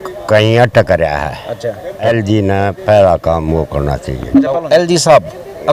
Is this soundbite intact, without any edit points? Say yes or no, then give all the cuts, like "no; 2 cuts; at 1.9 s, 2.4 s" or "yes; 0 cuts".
no; 2 cuts; at 2.1 s, 4.6 s